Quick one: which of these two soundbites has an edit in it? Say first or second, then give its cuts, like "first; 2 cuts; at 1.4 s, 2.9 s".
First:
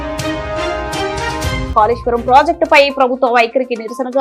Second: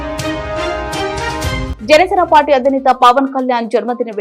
first; 1 cut; at 1.6 s